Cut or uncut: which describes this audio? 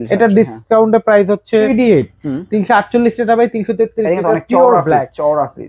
cut